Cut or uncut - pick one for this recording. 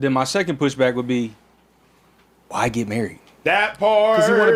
uncut